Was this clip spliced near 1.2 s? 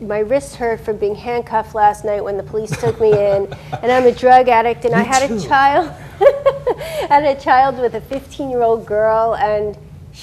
no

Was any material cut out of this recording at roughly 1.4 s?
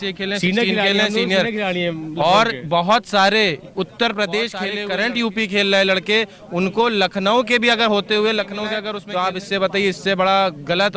no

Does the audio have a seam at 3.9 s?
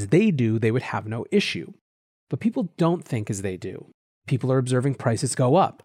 no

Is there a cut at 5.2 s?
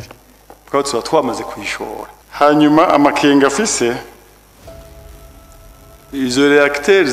no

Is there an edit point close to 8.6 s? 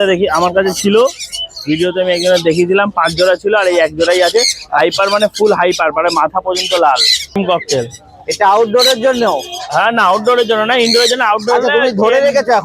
no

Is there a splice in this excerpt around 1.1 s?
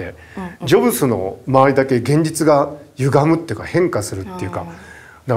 no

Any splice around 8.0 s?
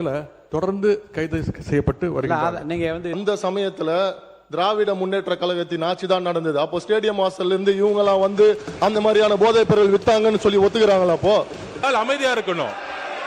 no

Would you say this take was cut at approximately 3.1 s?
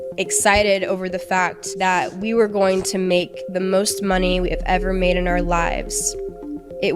no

